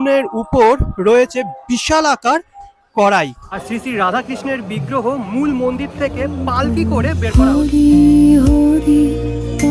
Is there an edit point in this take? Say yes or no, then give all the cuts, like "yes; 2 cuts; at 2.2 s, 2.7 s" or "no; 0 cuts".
yes; 2 cuts; at 3.5 s, 7.2 s